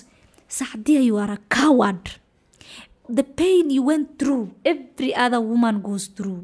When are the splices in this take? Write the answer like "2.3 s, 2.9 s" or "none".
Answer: 3.1 s